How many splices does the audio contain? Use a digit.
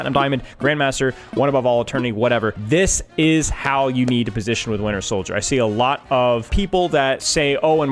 2